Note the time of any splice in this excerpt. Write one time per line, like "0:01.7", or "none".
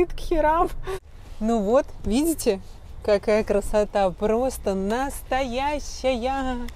0:01.0